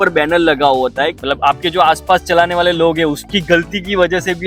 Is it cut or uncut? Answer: cut